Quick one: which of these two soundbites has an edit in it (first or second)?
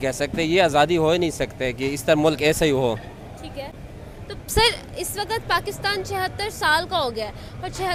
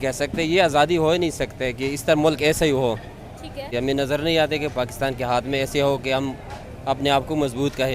second